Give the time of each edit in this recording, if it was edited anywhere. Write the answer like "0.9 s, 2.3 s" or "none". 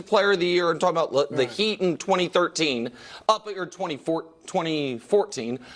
none

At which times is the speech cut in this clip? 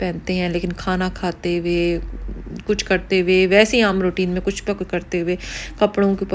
none

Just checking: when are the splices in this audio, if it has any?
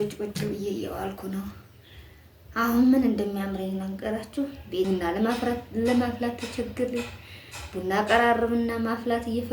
4.9 s

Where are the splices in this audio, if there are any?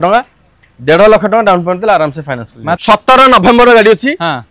2.7 s

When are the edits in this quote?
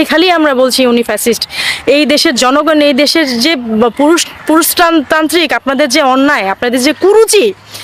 none

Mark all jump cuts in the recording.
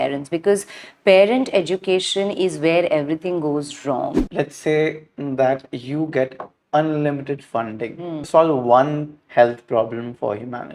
4.2 s, 8.2 s

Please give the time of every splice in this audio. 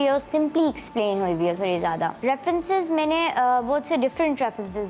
2.2 s

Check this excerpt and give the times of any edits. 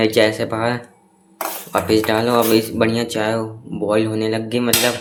none

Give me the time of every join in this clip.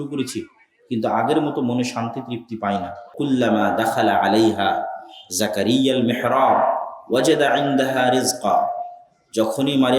3.1 s

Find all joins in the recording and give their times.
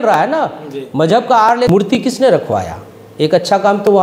1.7 s

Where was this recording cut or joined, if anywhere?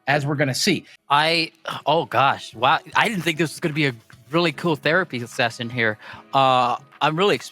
0.9 s

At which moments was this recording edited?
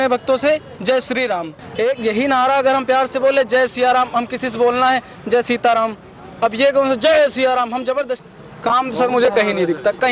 1.6 s, 8.2 s

